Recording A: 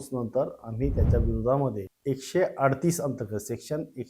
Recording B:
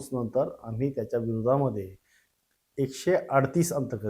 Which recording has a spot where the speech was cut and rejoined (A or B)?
A